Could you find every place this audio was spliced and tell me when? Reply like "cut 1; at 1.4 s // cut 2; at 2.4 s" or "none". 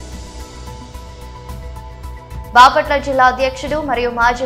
cut 1; at 1.3 s